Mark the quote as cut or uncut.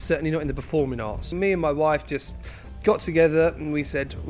cut